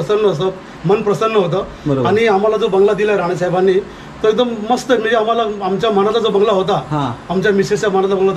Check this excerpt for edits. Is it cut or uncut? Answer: uncut